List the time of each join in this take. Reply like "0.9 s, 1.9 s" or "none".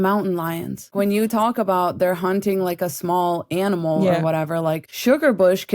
0.9 s, 4.9 s

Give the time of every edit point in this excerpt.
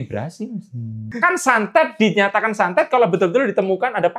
1.1 s

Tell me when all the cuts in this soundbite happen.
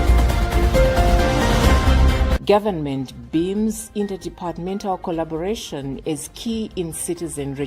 2.3 s

